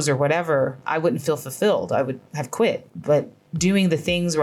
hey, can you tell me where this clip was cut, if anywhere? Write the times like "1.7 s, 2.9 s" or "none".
2.8 s